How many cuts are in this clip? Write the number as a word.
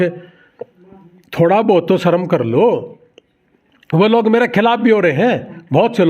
zero